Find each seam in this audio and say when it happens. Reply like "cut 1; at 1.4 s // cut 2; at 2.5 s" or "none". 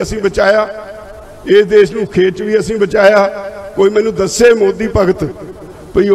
none